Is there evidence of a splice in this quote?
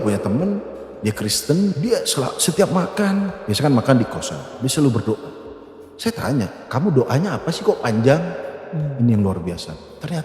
yes; 1 cut; at 1.7 s

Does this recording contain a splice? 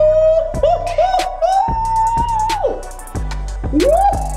no; 0 cuts

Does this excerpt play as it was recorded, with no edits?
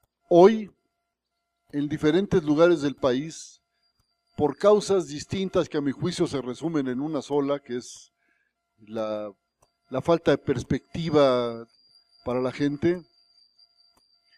yes; 0 cuts

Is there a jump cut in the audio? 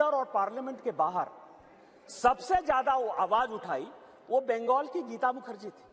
no; 0 cuts

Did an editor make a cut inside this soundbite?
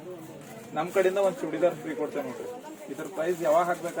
no; 0 cuts

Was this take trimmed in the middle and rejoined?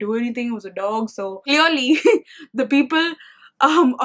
yes; 1 cut; at 1.5 s

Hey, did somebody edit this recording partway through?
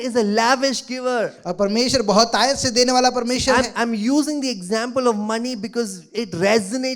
no; 0 cuts

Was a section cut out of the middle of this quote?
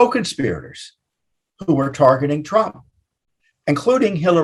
no; 0 cuts

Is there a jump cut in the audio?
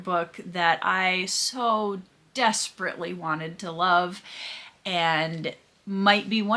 no; 0 cuts

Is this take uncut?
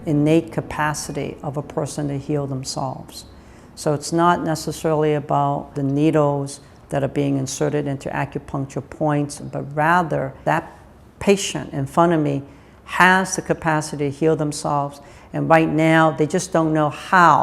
no; 3 cuts; at 5.7 s, 9.4 s, 10.4 s

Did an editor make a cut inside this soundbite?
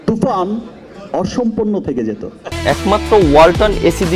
no; 0 cuts

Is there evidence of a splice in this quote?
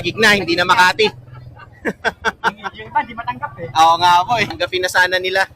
yes; 1 cut; at 4.5 s

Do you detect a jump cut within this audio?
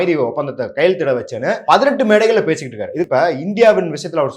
yes; 2 cuts; at 1.6 s, 3.1 s

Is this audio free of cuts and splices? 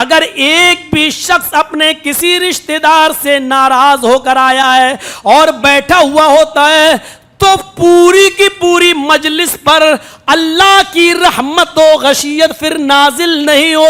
yes; 0 cuts

